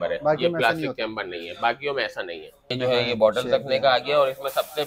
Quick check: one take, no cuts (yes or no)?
no